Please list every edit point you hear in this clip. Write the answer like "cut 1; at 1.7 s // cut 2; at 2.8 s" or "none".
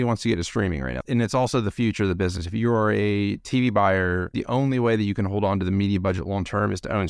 cut 1; at 1.0 s // cut 2; at 4.3 s

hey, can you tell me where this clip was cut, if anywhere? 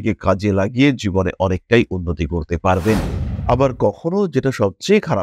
cut 1; at 3.2 s

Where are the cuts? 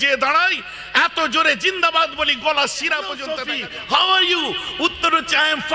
cut 1; at 3.2 s

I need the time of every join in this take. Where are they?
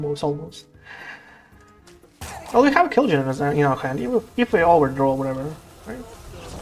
cut 1; at 2.2 s

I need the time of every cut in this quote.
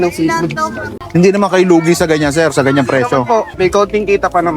cut 1; at 3.5 s

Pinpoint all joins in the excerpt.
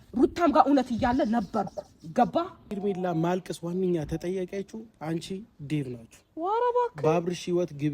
cut 1; at 2.8 s

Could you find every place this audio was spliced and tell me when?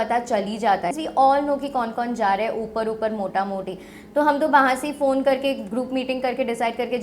cut 1; at 0.9 s

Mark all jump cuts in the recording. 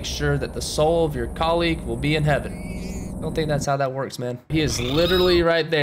cut 1; at 4.5 s

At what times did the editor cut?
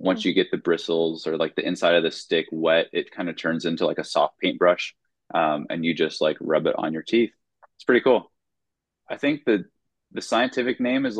none

